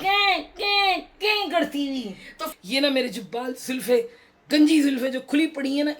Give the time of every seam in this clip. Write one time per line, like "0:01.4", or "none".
0:02.4